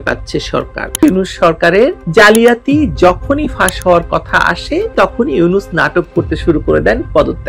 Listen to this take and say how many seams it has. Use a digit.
1